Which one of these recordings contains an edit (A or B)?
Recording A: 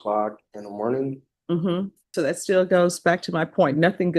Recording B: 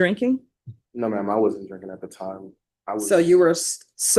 A